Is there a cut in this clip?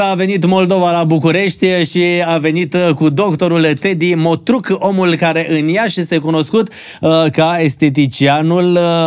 no; 0 cuts

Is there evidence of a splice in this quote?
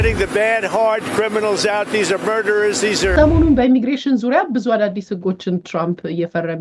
yes; 1 cut; at 3.1 s

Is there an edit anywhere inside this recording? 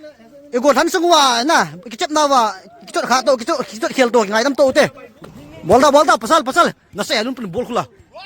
yes; 1 cut; at 5.1 s

